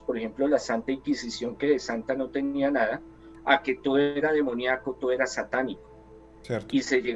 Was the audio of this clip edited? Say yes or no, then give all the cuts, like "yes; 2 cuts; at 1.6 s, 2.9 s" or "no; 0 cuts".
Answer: no; 0 cuts